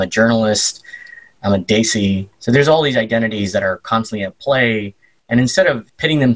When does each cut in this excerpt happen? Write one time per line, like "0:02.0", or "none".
0:02.3